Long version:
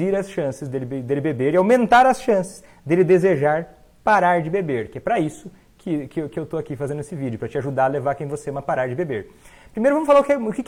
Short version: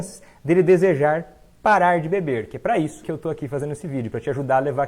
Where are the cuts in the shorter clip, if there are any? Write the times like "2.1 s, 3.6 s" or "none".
3.0 s